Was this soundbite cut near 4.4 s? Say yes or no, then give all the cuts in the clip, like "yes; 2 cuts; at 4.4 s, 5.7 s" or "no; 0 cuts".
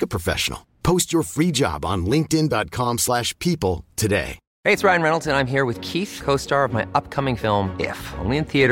yes; 1 cut; at 4.4 s